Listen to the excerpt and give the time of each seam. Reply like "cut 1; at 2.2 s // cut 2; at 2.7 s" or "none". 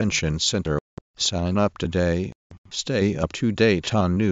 cut 1; at 1.0 s